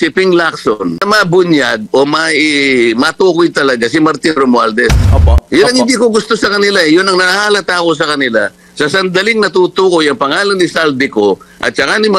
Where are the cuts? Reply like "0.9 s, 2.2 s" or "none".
1.0 s, 5.0 s